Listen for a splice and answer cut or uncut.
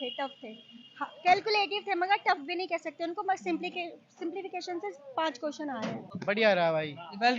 cut